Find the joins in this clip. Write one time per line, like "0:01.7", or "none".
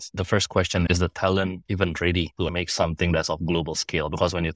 0:02.5